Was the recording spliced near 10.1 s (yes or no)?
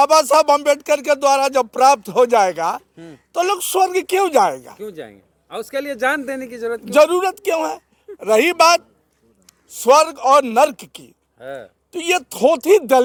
no